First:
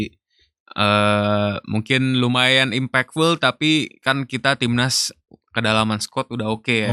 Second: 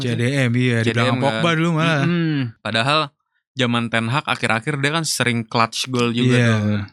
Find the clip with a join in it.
second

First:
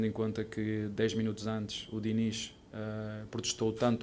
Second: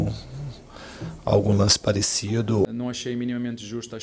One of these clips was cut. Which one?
second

